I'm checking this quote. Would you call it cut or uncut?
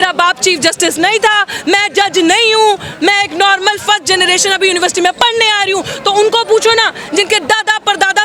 uncut